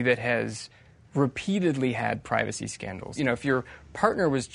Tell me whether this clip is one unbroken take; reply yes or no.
no